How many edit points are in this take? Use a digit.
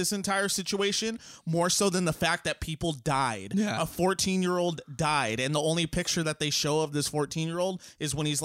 0